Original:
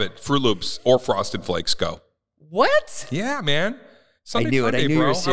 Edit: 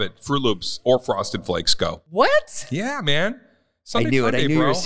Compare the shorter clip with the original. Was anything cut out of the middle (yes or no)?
yes